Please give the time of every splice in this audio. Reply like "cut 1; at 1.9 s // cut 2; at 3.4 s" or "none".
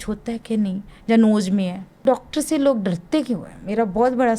cut 1; at 2.0 s